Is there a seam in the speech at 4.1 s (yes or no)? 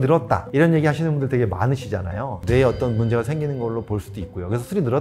no